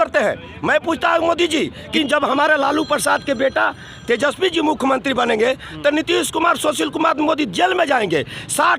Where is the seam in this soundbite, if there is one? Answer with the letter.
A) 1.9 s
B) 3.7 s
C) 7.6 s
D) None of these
A